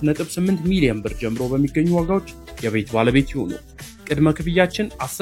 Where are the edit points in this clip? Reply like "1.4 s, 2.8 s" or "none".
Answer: none